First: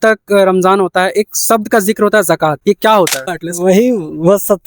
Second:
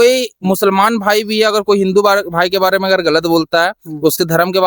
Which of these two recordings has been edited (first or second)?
first